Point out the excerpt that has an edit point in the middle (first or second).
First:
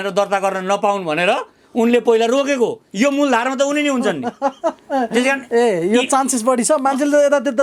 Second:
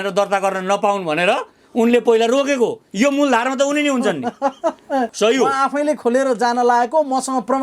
second